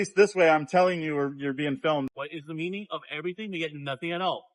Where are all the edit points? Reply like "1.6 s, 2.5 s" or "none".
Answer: 2.1 s